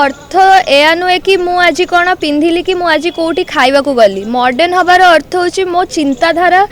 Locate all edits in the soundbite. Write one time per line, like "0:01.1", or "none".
none